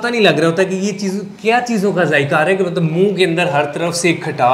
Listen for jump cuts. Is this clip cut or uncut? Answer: uncut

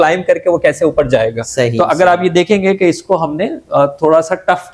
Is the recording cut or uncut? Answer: uncut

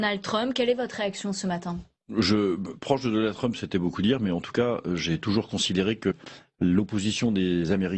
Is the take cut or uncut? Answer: uncut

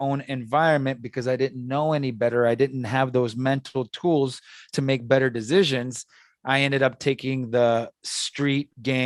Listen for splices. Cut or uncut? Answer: uncut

